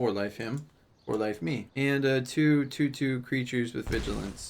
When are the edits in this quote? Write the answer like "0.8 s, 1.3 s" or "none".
1.7 s